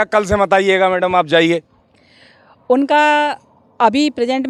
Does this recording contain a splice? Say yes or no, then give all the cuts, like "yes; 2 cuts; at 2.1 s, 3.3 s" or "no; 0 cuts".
no; 0 cuts